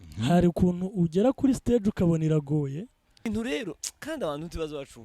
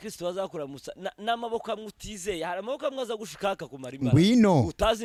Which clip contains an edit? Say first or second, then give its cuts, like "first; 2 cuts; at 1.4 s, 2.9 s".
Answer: first; 1 cut; at 3.2 s